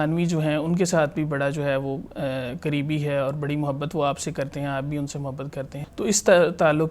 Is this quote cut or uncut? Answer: cut